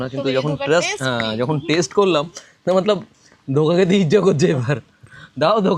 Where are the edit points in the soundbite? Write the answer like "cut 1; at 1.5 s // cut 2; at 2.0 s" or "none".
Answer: none